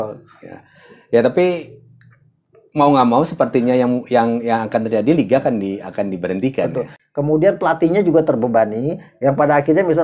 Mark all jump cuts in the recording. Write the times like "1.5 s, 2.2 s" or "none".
6.9 s